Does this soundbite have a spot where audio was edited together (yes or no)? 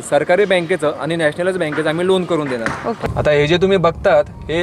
yes